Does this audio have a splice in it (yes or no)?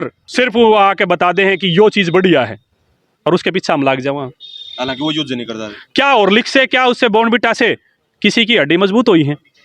no